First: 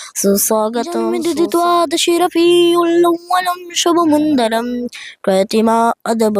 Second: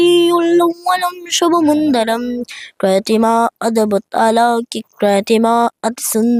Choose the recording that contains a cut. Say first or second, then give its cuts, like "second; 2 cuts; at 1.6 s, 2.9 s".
first; 1 cut; at 1.1 s